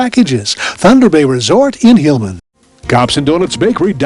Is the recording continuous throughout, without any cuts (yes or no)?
no